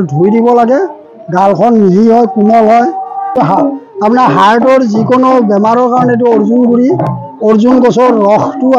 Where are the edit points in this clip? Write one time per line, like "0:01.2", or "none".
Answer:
0:03.3

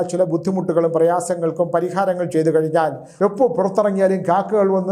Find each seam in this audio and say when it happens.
0:03.0

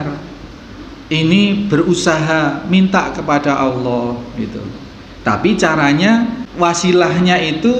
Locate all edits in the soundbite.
0:06.4

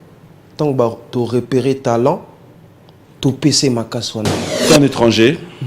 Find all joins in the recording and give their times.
0:04.7

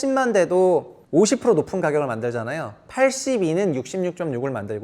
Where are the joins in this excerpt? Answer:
0:01.0

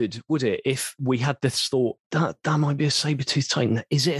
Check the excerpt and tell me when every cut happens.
0:01.0
0:02.0

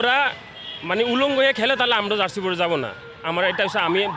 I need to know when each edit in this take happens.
none

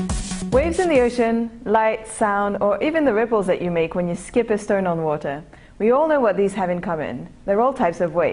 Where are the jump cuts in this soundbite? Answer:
0:01.0

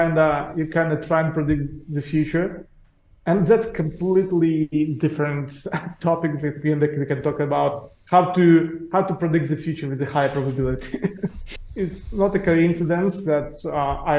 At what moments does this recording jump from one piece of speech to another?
0:11.5

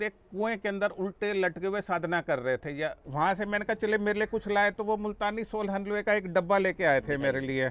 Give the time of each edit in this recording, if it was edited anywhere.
0:03.0

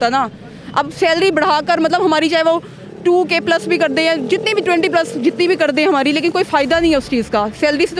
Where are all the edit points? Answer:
none

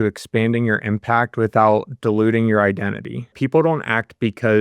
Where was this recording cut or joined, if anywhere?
0:03.3

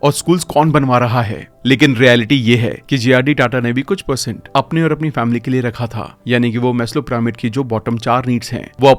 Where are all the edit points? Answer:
none

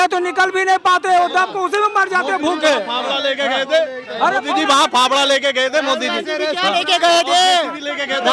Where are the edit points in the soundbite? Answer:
none

